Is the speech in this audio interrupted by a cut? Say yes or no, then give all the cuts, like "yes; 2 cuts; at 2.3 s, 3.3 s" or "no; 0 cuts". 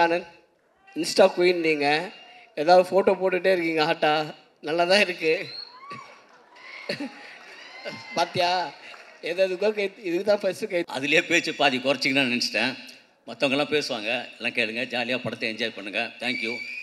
yes; 1 cut; at 10.9 s